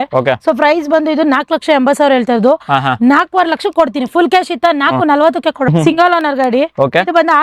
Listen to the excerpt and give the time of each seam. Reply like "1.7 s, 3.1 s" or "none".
5.7 s